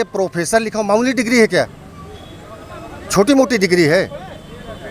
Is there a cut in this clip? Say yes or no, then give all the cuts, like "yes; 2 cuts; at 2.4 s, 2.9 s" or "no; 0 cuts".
no; 0 cuts